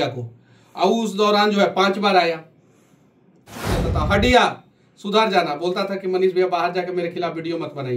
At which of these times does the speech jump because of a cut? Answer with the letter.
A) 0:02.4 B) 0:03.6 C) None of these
B